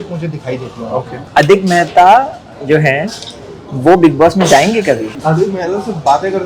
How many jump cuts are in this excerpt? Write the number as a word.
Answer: two